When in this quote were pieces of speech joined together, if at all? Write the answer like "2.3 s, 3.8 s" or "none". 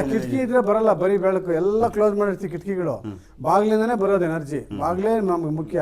none